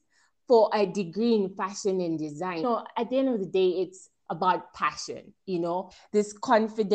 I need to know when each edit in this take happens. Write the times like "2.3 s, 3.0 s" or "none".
2.6 s, 5.9 s